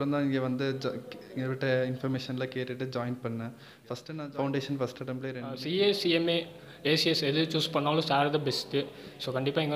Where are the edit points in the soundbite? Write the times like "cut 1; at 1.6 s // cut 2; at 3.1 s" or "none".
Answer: cut 1; at 4.2 s // cut 2; at 5.5 s